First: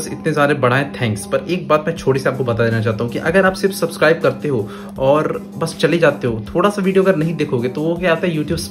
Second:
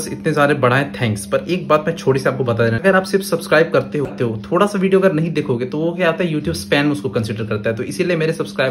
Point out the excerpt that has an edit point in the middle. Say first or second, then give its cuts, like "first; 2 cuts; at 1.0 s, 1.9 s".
second; 2 cuts; at 2.8 s, 4.1 s